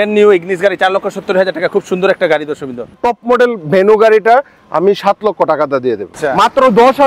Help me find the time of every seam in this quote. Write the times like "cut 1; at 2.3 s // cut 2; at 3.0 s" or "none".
cut 1; at 3.0 s // cut 2; at 6.1 s